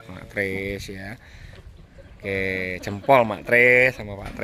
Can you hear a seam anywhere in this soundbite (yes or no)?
no